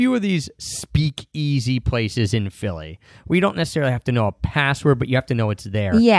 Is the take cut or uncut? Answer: uncut